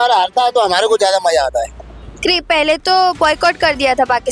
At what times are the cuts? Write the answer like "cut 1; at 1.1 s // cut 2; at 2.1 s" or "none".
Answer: cut 1; at 1.8 s